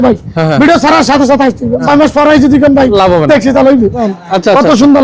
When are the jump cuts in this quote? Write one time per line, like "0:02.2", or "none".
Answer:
0:01.8
0:04.0